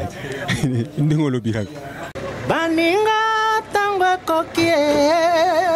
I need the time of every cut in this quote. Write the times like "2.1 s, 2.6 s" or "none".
2.3 s